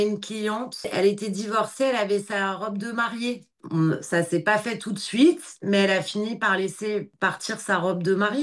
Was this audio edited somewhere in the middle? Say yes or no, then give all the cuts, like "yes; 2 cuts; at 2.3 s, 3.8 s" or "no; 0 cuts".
yes; 2 cuts; at 3.5 s, 7.1 s